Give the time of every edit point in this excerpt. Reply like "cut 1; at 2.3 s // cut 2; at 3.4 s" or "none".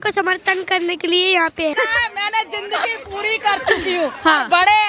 cut 1; at 1.7 s